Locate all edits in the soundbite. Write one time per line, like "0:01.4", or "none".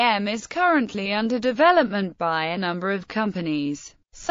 0:01.6

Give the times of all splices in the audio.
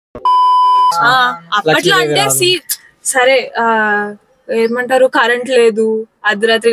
0:01.0

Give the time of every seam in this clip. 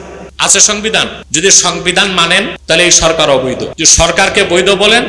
0:01.2
0:02.6
0:03.8

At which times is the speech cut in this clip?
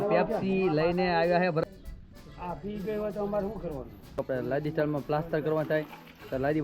0:01.6
0:04.2

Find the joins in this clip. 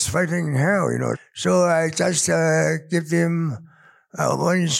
0:01.2

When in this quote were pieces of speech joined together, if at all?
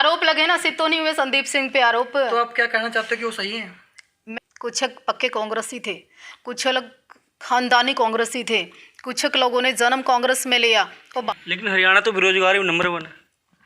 0:04.2
0:11.3

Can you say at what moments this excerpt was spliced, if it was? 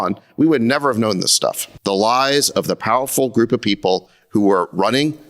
0:01.7

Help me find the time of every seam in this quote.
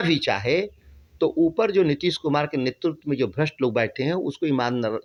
none

